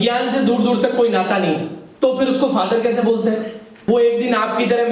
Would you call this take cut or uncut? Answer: cut